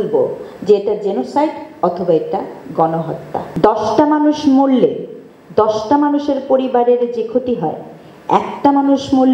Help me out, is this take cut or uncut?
cut